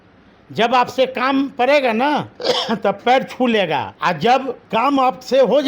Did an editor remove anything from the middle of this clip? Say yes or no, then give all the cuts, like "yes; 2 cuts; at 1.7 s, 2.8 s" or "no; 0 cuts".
yes; 3 cuts; at 2.3 s, 3.9 s, 4.6 s